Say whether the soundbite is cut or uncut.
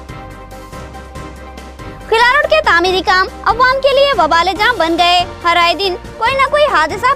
cut